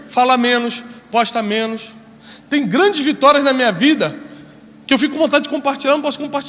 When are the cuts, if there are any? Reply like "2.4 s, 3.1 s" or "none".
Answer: none